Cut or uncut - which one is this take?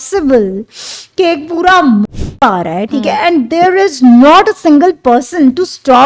uncut